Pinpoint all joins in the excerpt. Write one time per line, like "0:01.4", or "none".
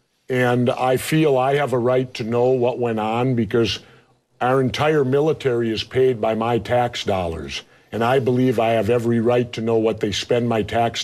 0:03.0